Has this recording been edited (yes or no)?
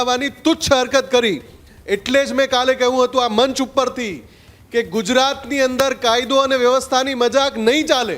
no